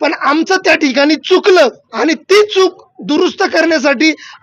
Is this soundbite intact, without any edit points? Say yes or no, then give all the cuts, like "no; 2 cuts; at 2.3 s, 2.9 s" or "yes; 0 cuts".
no; 1 cut; at 1.8 s